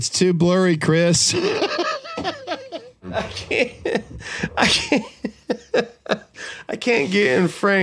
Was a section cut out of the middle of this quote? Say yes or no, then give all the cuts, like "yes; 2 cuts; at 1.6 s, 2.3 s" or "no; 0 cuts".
yes; 1 cut; at 3.1 s